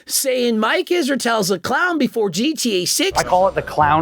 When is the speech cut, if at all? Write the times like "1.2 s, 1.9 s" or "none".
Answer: 3.1 s